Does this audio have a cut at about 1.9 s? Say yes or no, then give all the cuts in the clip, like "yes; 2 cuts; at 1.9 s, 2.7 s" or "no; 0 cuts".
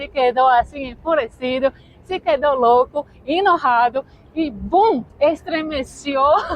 no; 1 cut; at 5.1 s